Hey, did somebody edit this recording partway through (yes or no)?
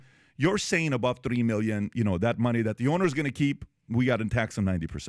no